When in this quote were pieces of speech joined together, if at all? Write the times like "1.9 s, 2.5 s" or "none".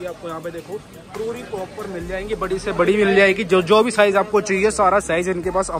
none